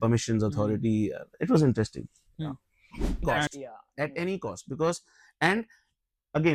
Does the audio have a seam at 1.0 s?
no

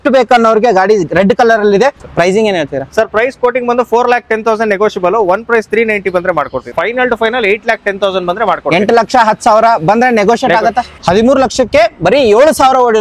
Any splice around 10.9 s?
yes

